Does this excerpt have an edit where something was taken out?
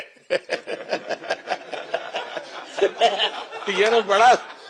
no; 0 cuts

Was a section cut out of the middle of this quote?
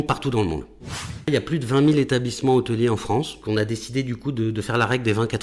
yes; 2 cuts; at 1.3 s, 3.4 s

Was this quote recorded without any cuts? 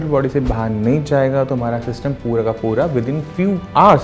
yes; 0 cuts

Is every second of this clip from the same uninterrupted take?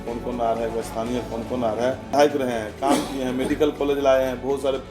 no; 1 cut; at 2.1 s

